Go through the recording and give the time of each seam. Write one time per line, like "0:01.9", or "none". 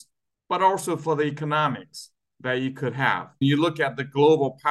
0:03.4

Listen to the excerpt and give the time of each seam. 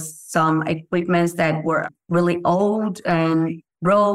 0:01.8

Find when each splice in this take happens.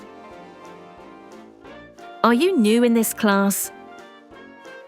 0:03.7

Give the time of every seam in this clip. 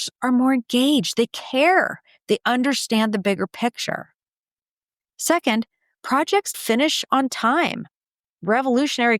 0:06.6

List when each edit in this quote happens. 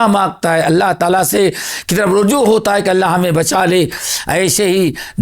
none

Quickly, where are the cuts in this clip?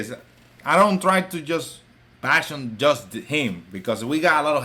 none

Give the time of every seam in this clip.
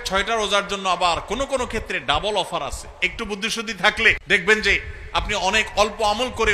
0:04.2

